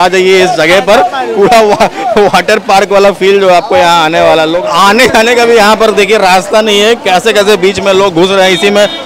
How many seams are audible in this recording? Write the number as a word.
one